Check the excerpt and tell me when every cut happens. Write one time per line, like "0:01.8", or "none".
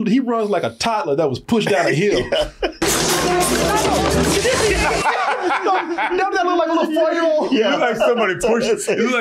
none